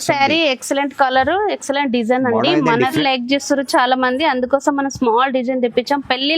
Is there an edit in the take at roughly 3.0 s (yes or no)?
yes